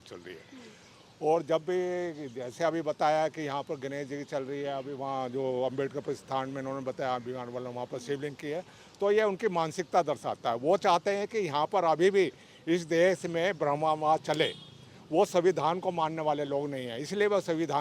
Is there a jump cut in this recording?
no; 0 cuts

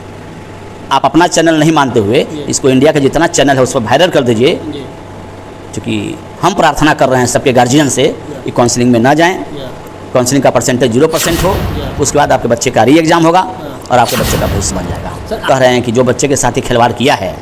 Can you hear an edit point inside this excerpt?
yes; 1 cut; at 15.4 s

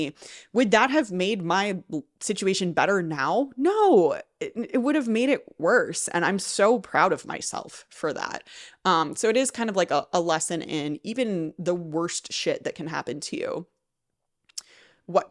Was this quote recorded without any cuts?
yes; 0 cuts

